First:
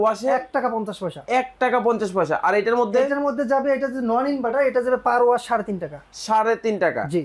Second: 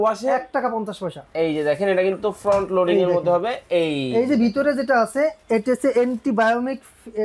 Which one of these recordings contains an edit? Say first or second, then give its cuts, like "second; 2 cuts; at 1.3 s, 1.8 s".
second; 1 cut; at 1.1 s